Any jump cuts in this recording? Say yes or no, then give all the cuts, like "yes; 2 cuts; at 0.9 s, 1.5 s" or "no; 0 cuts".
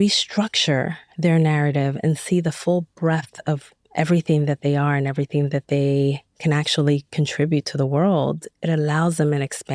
no; 0 cuts